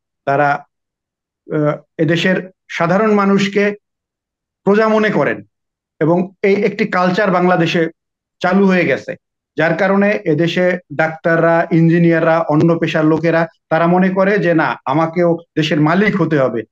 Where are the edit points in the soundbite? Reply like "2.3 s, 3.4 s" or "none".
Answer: none